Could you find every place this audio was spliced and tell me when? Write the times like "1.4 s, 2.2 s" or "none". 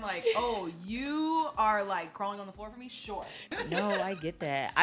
3.6 s